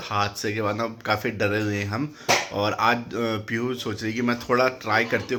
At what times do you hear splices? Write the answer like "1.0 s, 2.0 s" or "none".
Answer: none